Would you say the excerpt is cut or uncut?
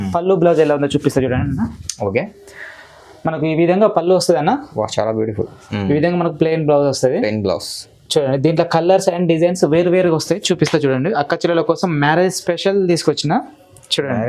uncut